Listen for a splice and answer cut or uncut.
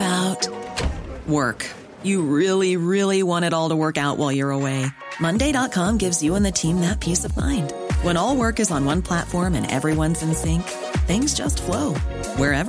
uncut